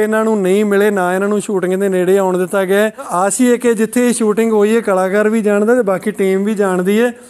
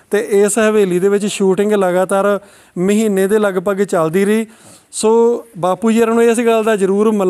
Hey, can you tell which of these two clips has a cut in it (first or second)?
first